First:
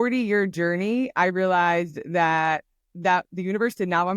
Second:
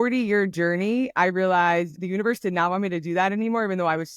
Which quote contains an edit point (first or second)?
second